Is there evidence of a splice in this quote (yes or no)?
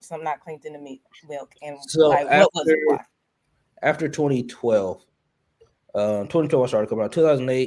no